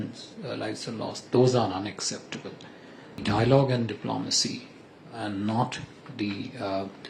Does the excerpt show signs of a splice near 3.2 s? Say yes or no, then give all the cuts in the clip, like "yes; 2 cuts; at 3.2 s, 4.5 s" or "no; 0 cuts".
yes; 1 cut; at 3.2 s